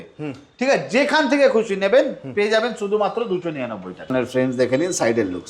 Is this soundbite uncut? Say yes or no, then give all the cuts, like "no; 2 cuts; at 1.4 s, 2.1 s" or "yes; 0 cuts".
no; 1 cut; at 4.1 s